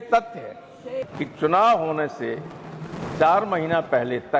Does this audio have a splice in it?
yes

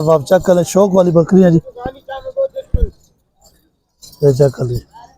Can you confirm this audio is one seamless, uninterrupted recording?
yes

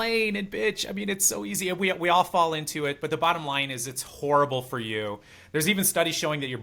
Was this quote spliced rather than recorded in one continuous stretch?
no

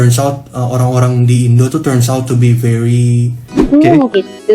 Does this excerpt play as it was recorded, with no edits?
no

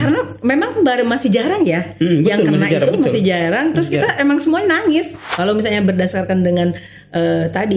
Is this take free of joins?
no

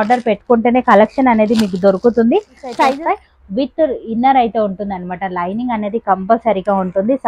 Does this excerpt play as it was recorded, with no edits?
no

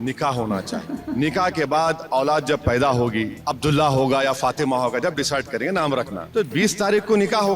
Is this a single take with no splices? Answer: no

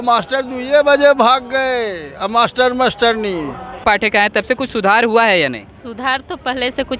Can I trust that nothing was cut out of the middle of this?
no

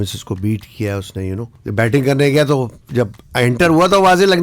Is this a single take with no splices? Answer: no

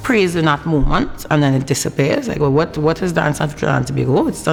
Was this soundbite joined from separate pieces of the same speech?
no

